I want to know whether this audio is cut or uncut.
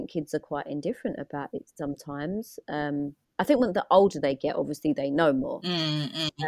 uncut